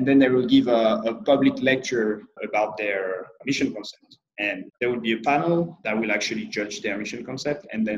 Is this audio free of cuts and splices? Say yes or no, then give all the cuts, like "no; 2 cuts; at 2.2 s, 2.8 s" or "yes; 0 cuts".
no; 4 cuts; at 2.4 s, 3.4 s, 4.7 s, 5.8 s